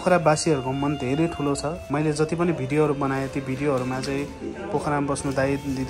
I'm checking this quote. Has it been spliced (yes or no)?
yes